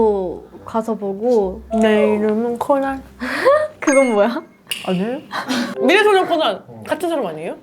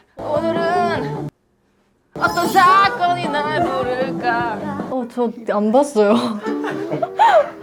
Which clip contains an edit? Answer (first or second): first